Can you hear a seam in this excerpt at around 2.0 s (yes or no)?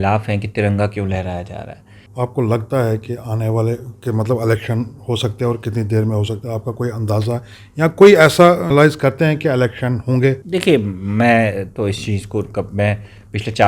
yes